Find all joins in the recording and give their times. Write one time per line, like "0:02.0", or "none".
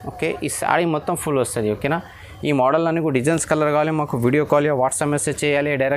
none

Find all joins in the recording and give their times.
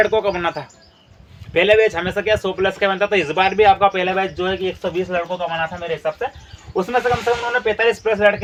none

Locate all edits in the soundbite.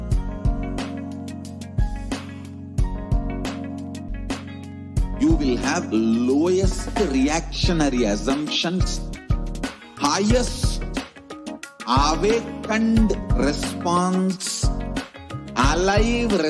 0:04.1

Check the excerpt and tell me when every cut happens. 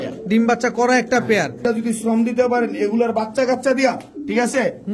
0:01.6

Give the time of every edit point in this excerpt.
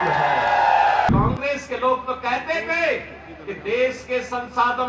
0:01.1

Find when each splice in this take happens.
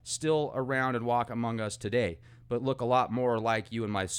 0:03.1

